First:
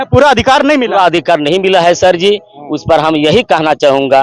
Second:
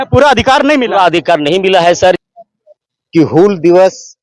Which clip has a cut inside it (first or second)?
second